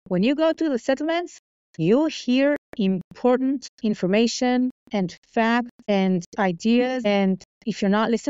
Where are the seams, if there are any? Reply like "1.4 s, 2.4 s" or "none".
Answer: 3.7 s, 5.9 s, 7.1 s